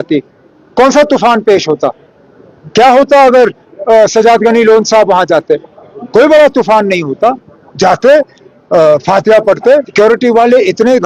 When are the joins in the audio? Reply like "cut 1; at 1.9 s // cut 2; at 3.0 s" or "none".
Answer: cut 1; at 9.9 s